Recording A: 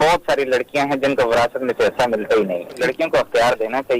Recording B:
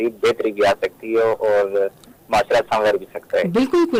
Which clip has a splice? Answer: A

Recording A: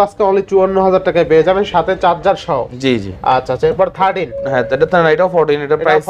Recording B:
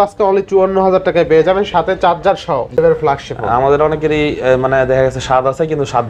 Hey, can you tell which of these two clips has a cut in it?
B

